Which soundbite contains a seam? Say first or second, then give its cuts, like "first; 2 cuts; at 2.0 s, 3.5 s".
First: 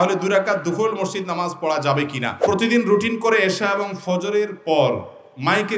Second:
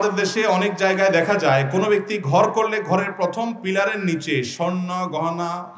first; 1 cut; at 2.4 s